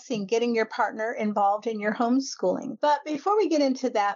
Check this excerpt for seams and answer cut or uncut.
cut